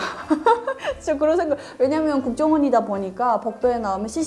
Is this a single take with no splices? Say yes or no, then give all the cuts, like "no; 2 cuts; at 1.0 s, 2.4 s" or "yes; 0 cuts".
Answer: yes; 0 cuts